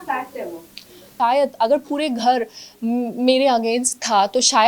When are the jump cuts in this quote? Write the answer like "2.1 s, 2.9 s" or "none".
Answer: 1.1 s